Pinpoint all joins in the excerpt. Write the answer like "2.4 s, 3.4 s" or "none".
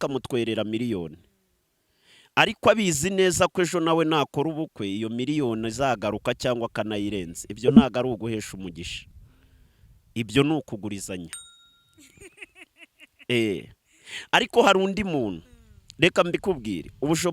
none